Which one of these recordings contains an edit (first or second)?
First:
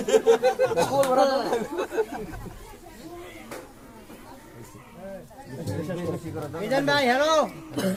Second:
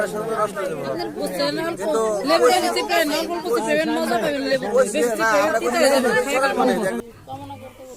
second